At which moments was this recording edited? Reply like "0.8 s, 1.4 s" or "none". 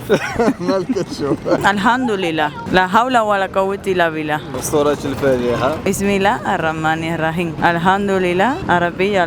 1.6 s